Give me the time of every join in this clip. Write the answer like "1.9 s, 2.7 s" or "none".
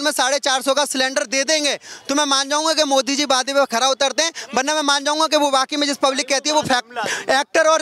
none